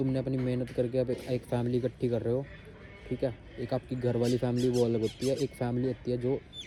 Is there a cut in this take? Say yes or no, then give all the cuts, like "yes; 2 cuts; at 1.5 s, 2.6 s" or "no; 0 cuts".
no; 0 cuts